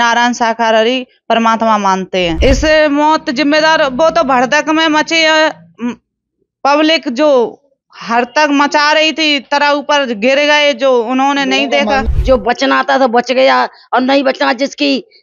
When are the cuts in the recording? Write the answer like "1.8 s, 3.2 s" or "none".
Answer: 2.4 s, 12.0 s